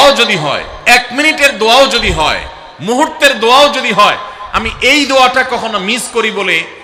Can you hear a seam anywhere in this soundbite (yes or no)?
no